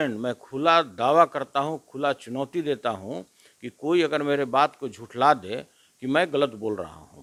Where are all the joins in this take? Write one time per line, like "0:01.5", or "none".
none

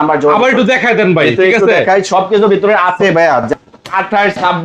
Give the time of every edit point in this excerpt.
0:03.5

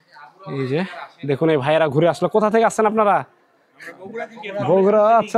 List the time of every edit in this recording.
none

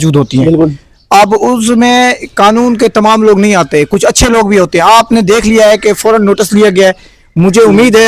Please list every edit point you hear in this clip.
none

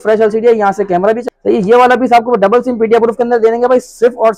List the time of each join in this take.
0:01.2

